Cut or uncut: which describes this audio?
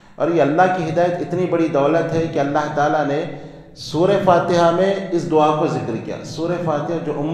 uncut